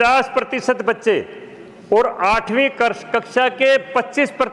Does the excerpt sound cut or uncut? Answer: uncut